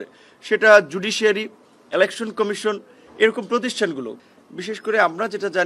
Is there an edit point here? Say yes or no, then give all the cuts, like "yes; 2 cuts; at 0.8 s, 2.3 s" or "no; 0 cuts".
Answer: yes; 1 cut; at 4.1 s